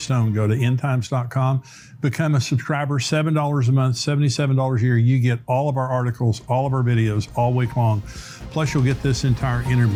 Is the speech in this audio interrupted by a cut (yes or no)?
no